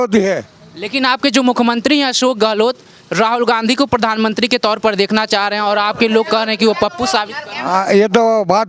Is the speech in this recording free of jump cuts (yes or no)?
yes